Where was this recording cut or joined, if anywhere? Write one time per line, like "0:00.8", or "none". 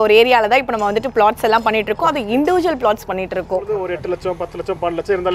0:03.9